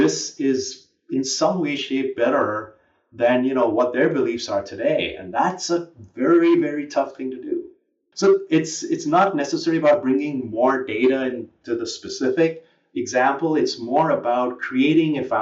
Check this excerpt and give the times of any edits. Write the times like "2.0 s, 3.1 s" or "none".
8.0 s